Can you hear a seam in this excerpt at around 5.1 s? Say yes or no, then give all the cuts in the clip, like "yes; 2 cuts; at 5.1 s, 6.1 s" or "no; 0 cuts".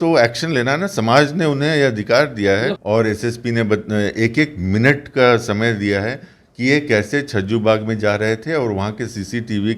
no; 1 cut; at 2.8 s